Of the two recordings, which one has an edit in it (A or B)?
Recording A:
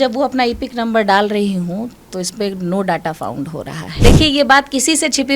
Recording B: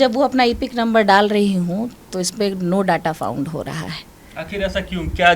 A